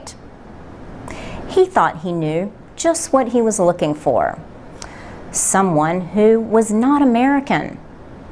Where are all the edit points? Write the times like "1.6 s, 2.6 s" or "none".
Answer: 5.7 s